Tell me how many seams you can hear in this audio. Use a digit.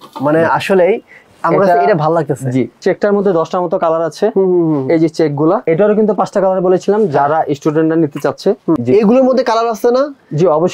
3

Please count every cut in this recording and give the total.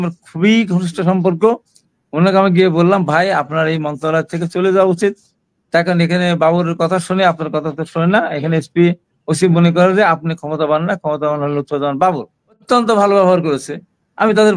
1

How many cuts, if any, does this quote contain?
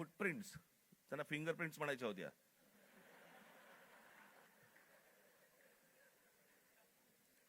1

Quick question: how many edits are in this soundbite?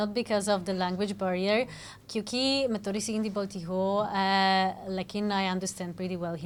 0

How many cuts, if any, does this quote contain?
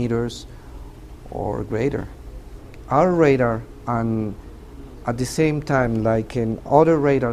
0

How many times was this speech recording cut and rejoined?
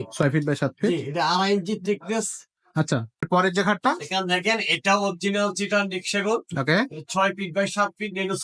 1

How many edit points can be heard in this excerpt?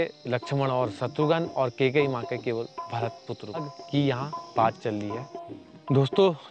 1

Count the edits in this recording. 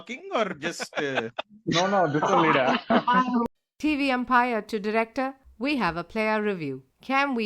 1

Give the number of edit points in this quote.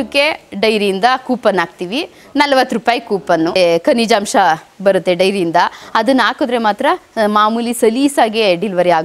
1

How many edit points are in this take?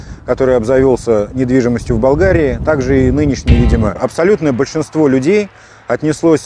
1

